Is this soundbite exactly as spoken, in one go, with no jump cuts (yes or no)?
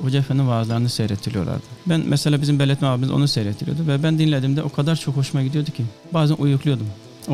no